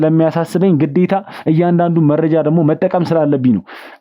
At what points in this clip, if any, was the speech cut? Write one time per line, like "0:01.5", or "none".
none